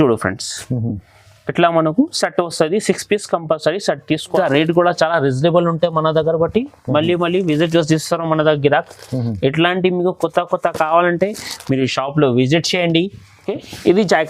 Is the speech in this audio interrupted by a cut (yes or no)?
yes